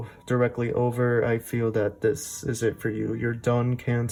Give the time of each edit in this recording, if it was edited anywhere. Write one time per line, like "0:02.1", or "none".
none